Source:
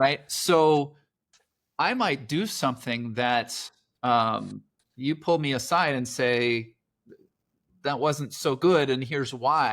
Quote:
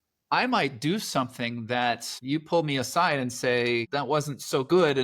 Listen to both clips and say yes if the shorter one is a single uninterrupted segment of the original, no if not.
no